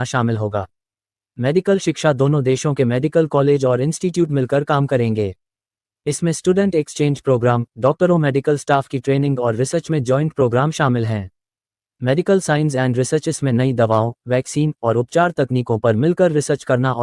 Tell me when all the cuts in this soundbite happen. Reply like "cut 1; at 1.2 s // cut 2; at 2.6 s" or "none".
none